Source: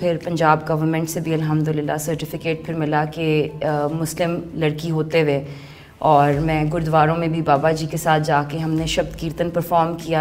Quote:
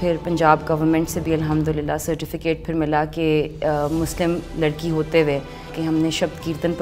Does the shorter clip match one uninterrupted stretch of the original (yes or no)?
no